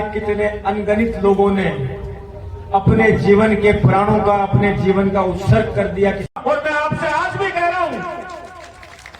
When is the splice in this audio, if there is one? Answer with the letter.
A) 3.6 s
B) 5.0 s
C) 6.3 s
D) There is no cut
C